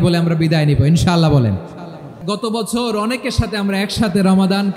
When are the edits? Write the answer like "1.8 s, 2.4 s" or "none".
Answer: 2.2 s